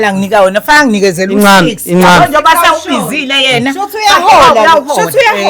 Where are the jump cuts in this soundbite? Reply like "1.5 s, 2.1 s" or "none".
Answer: none